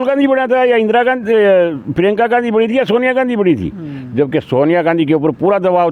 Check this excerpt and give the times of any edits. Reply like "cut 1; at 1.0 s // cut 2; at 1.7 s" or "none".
none